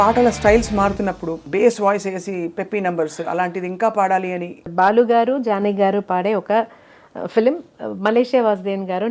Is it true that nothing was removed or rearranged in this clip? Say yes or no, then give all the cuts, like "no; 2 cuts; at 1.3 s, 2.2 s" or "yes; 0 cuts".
no; 2 cuts; at 1.3 s, 4.6 s